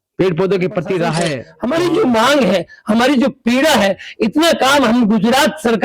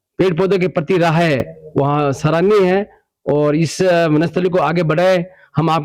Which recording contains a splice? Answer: first; 1 cut; at 1.4 s

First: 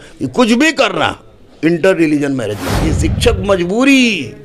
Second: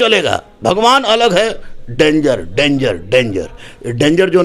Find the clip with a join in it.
first; 1 cut; at 2.9 s

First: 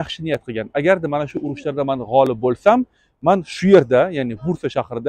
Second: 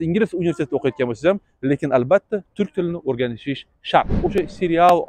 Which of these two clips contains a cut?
second; 1 cut; at 4.2 s

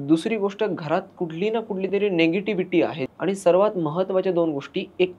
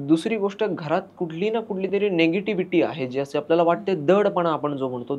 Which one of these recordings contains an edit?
first; 1 cut; at 3.0 s

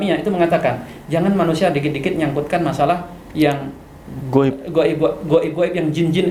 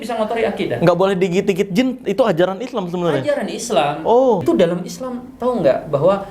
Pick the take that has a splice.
second; 1 cut; at 4.4 s

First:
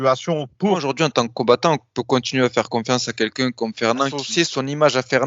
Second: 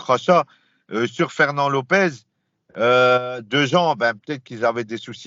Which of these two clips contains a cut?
first; 2 cuts; at 0.9 s, 4.2 s

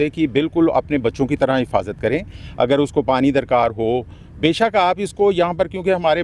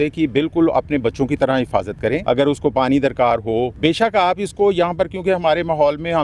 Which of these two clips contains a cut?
second; 2 cuts; at 2.2 s, 3.7 s

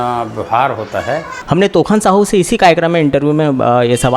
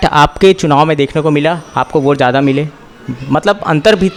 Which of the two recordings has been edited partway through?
first; 1 cut; at 1.3 s

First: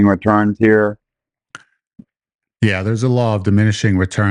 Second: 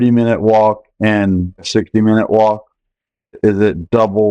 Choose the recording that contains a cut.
second; 2 cuts; at 1.7 s, 3.4 s

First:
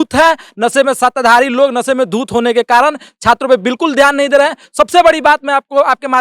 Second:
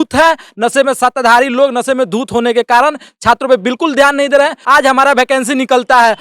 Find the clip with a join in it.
second; 1 cut; at 4.6 s

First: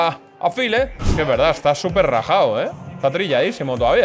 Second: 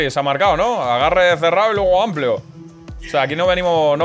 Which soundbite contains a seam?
first; 1 cut; at 1.0 s

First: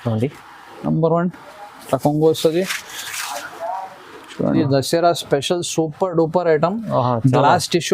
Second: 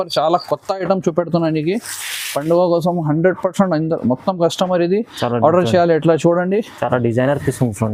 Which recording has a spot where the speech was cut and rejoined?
first; 1 cut; at 4.6 s

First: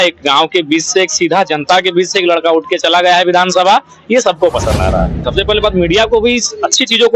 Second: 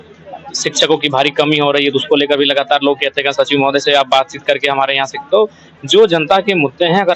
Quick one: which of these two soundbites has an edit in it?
first; 1 cut; at 5.2 s

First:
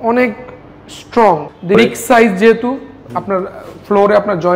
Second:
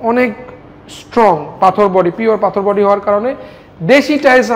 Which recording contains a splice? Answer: first; 1 cut; at 1.6 s

